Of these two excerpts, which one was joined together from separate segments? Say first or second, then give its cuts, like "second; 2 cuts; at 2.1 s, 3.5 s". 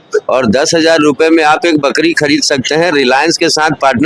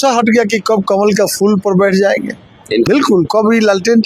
second; 1 cut; at 2.9 s